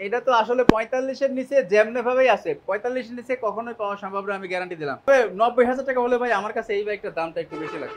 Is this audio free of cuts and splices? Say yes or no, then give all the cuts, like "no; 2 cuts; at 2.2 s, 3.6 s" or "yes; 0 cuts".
no; 1 cut; at 5.1 s